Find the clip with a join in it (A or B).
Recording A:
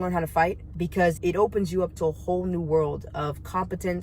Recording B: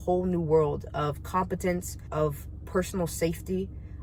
A